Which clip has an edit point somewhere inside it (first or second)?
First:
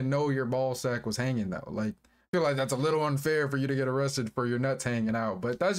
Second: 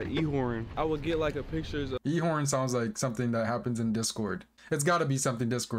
second